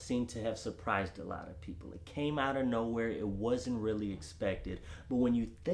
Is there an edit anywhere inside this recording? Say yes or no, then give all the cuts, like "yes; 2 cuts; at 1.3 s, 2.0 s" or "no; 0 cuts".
no; 0 cuts